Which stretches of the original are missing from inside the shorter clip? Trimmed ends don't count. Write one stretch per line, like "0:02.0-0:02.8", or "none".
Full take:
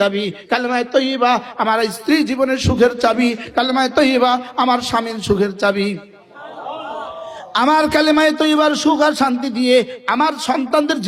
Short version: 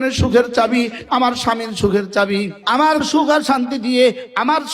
0:03.5-0:04.5
0:06.5-0:08.7